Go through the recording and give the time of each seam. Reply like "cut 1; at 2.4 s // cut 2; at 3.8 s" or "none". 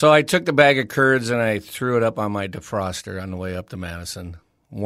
none